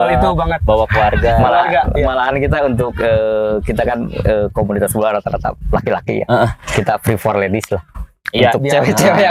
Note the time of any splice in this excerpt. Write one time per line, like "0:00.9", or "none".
none